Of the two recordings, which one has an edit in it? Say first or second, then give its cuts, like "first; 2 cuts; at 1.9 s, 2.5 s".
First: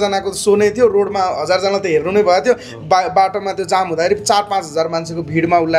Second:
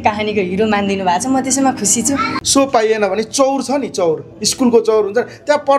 second; 1 cut; at 2.4 s